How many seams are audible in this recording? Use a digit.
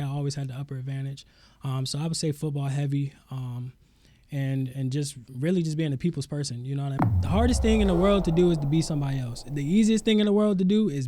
1